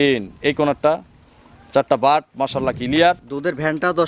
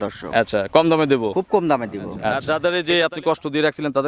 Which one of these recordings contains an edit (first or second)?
second